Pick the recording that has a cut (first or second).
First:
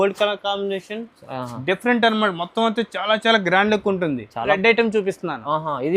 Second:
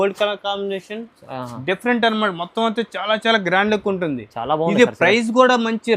first